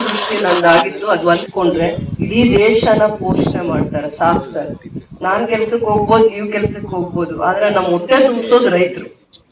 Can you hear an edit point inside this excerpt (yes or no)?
yes